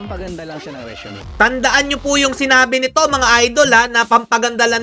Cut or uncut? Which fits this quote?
uncut